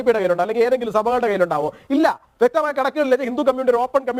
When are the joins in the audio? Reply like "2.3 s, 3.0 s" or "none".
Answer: none